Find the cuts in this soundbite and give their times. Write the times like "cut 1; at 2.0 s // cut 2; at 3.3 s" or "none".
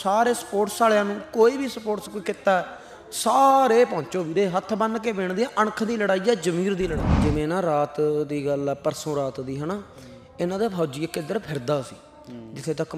cut 1; at 7.1 s